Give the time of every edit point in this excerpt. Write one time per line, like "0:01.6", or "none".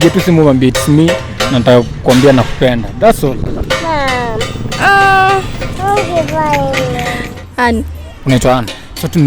0:07.2